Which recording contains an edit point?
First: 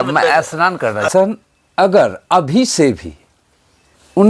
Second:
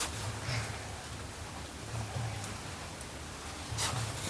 first; 1 cut; at 1.1 s

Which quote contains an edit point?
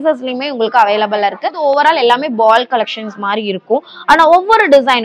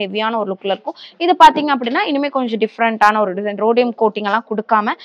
first; 1 cut; at 1.6 s

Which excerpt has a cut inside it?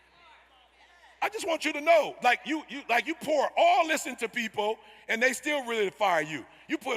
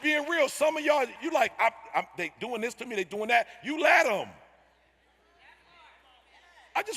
second; 1 cut; at 1.2 s

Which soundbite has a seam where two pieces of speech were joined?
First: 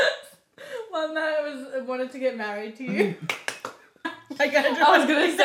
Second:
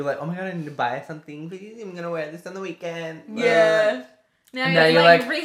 first; 1 cut; at 4.1 s

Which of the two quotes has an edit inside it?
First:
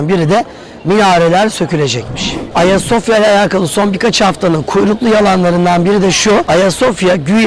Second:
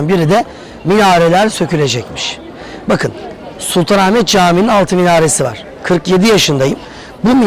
first; 2 cuts; at 2.5 s, 6.5 s

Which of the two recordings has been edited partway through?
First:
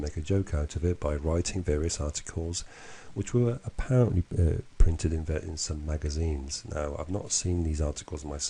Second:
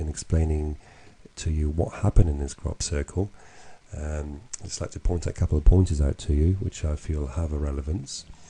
second; 1 cut; at 5.1 s

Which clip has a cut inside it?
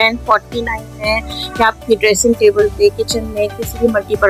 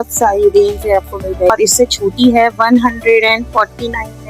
second; 1 cut; at 1.5 s

